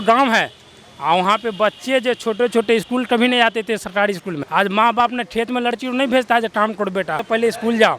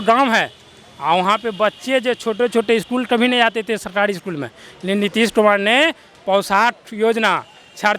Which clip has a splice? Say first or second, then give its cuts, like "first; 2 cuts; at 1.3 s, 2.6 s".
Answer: first; 2 cuts; at 4.4 s, 7.2 s